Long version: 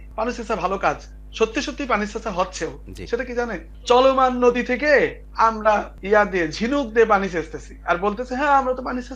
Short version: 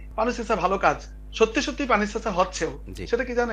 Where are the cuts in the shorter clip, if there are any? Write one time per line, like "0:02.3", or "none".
none